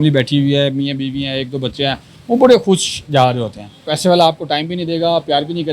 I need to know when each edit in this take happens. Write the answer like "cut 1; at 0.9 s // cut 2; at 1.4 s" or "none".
cut 1; at 3.8 s